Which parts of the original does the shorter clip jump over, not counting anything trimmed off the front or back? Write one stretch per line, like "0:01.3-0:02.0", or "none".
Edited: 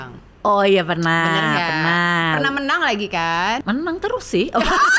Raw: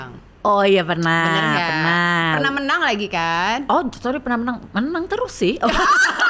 0:03.6-0:04.7